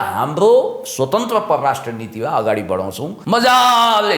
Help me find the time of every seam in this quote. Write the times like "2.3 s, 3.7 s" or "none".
3.1 s